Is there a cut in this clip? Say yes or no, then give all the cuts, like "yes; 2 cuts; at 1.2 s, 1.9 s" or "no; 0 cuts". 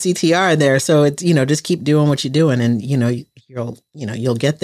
no; 0 cuts